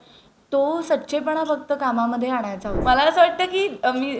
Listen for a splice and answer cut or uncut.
cut